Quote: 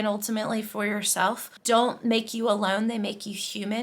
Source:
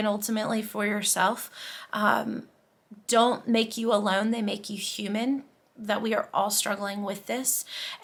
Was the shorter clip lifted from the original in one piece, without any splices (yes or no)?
no